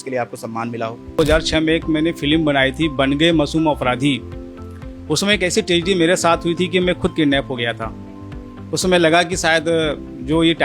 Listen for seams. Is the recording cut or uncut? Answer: cut